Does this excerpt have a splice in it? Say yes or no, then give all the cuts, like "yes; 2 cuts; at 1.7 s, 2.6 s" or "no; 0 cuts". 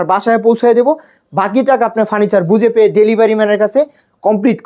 no; 0 cuts